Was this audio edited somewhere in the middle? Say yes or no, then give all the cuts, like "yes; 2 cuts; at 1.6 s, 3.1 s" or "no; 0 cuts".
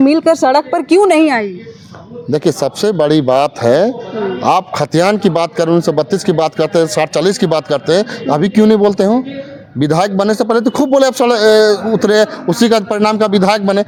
no; 0 cuts